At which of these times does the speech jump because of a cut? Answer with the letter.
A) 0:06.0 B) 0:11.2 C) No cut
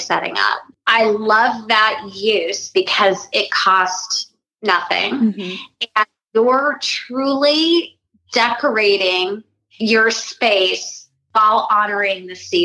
B